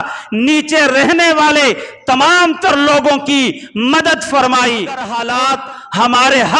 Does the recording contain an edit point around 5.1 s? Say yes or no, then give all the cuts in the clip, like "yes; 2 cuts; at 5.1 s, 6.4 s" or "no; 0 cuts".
yes; 1 cut; at 5.1 s